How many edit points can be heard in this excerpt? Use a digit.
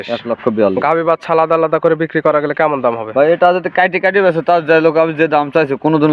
0